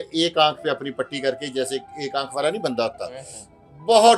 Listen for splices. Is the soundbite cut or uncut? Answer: uncut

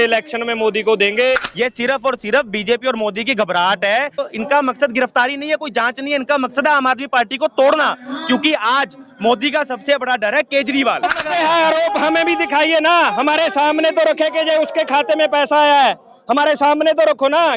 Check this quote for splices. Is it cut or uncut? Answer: cut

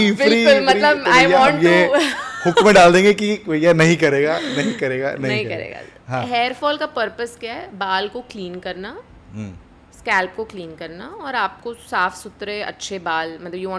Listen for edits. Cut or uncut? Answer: uncut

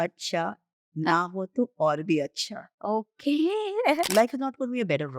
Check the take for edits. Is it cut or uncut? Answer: cut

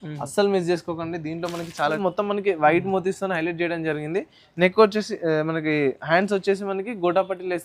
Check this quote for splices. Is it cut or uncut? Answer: cut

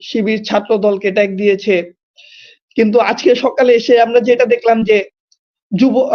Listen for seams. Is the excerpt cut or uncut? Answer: uncut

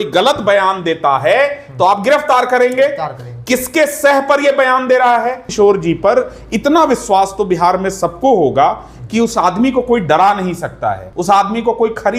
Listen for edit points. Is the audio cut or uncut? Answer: cut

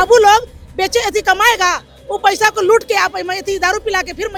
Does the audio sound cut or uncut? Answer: uncut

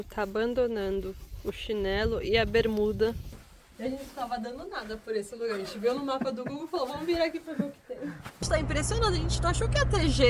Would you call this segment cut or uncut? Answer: cut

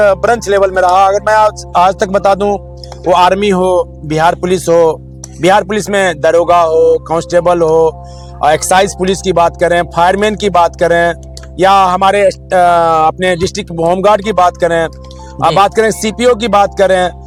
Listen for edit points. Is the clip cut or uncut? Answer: uncut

